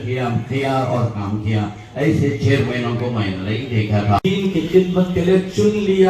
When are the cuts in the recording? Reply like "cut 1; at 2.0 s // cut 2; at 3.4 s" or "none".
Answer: cut 1; at 4.2 s